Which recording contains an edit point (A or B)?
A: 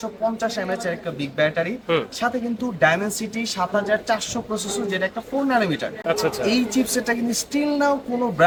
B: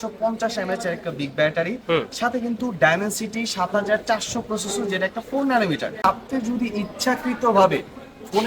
B